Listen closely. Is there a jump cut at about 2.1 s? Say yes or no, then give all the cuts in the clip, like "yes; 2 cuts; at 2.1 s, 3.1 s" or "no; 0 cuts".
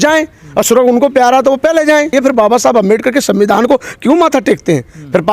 yes; 1 cut; at 2.1 s